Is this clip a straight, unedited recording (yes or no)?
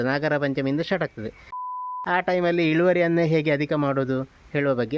no